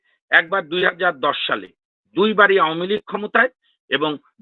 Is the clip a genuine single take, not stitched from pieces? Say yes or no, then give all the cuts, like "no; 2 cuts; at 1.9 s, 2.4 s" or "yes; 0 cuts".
yes; 0 cuts